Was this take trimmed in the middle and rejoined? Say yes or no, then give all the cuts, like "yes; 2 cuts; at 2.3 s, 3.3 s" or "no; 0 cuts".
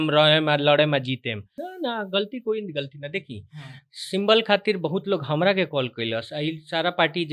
yes; 1 cut; at 1.6 s